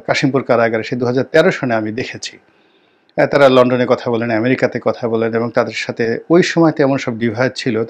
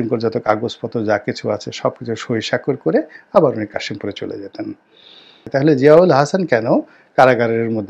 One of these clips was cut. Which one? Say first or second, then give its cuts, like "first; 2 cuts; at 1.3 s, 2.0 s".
second; 1 cut; at 5.4 s